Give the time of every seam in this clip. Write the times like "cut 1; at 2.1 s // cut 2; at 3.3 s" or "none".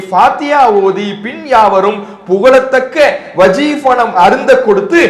none